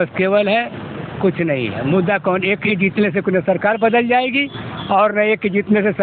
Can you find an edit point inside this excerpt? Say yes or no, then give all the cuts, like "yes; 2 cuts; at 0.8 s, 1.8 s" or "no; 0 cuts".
no; 0 cuts